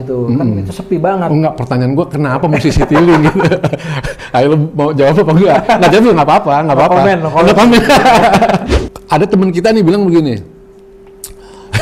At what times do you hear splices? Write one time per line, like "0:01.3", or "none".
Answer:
0:08.7